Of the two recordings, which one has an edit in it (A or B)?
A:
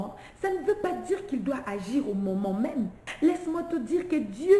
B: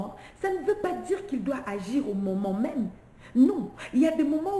A